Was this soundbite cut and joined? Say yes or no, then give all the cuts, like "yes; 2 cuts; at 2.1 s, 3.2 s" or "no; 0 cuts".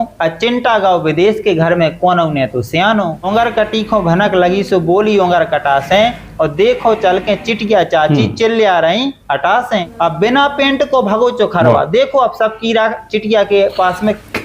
yes; 2 cuts; at 3.2 s, 9.9 s